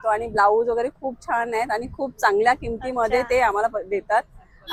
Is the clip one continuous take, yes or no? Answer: yes